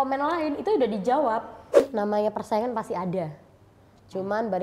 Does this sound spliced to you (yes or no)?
yes